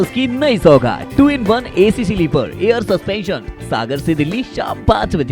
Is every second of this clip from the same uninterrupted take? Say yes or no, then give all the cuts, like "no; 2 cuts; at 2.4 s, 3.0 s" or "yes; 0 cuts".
yes; 0 cuts